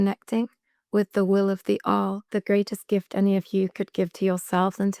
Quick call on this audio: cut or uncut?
cut